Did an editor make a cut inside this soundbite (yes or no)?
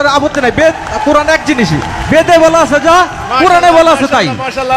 no